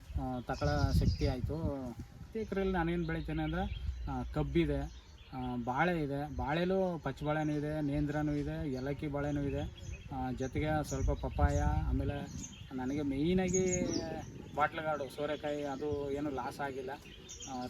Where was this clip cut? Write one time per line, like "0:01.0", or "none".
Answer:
0:02.2